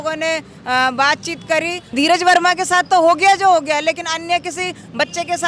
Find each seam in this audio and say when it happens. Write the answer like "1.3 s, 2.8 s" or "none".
1.9 s